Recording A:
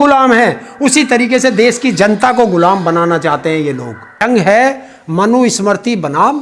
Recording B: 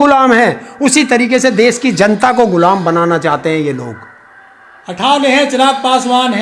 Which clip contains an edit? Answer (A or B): A